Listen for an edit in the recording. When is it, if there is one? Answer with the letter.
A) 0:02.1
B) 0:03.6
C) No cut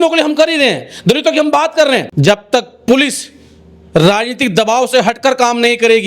A